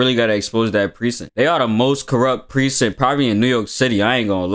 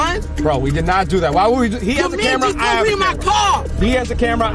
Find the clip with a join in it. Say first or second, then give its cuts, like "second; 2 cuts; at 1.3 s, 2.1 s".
first; 1 cut; at 1.2 s